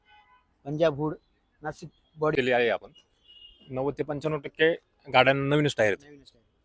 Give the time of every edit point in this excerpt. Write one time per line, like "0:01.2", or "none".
0:02.3